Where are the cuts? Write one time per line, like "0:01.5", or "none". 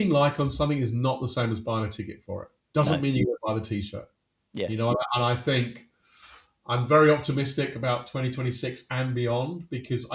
none